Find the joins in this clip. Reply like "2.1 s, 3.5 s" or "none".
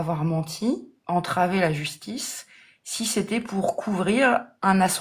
none